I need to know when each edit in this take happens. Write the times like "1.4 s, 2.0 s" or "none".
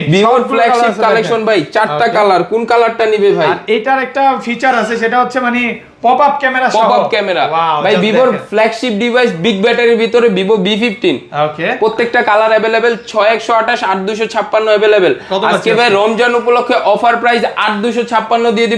none